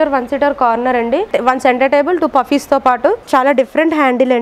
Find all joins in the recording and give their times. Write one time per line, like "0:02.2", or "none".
0:01.3
0:03.2